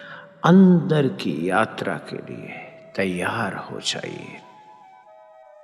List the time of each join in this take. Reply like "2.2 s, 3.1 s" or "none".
4.7 s